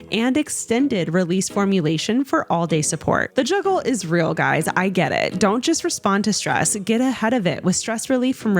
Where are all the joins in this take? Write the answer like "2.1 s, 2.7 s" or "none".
3.3 s